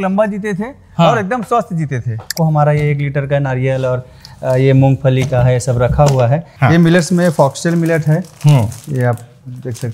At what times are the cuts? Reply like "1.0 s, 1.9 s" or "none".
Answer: 2.3 s, 6.5 s